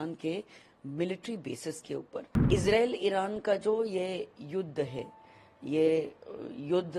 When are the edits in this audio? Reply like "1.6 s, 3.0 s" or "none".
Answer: 2.4 s